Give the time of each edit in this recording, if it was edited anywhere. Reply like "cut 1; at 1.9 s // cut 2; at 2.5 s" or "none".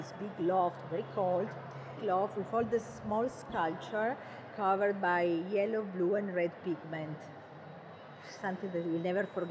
cut 1; at 1.9 s